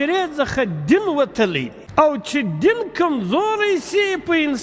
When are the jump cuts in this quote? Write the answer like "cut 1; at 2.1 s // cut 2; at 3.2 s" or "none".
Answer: cut 1; at 1.8 s